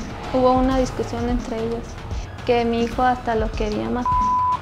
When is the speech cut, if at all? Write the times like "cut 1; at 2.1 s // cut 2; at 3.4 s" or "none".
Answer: none